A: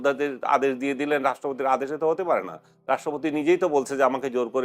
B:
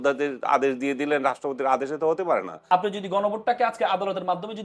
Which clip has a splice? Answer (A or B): B